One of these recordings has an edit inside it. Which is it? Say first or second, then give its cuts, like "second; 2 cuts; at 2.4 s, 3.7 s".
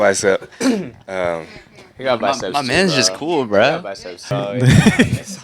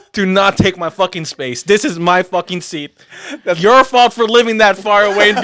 first; 1 cut; at 4.3 s